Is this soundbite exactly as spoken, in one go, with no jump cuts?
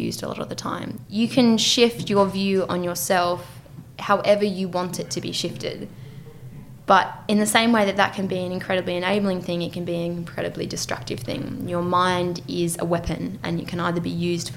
no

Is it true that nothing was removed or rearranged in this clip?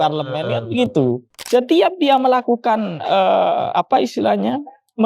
no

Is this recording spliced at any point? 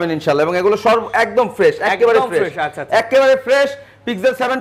no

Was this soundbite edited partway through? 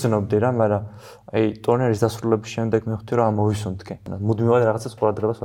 yes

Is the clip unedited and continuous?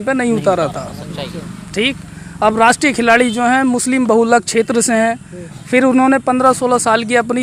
yes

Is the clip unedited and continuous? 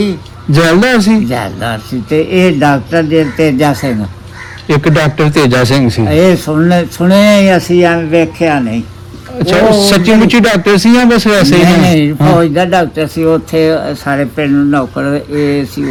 yes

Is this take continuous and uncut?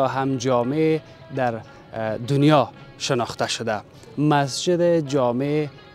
yes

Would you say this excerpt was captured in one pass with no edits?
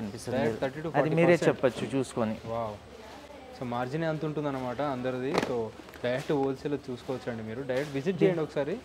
yes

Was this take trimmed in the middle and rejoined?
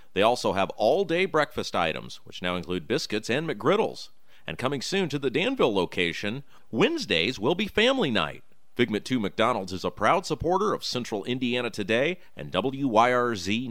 no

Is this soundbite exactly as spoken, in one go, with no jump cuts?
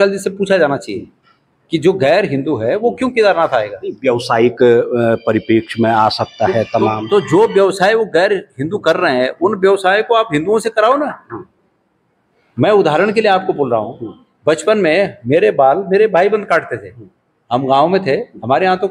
yes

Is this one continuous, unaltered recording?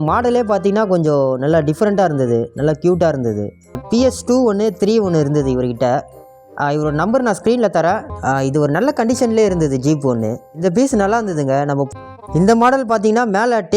no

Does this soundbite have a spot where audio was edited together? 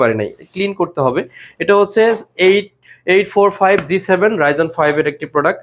no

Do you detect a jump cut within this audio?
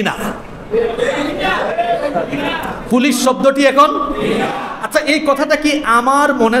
no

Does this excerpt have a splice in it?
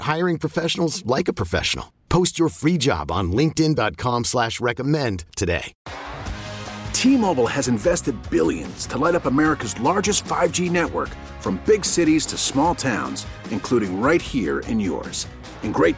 yes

